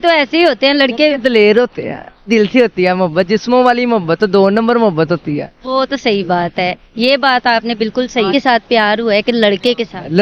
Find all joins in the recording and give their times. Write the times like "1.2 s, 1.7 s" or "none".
2.3 s, 8.3 s